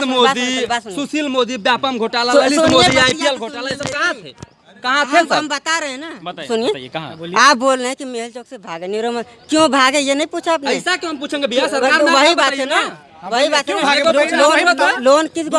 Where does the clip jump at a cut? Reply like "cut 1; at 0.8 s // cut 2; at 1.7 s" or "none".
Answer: none